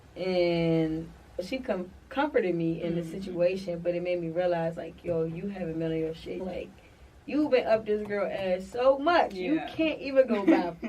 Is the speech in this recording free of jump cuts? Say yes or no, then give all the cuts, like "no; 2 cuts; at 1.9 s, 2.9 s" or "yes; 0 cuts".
no; 2 cuts; at 1.4 s, 6.4 s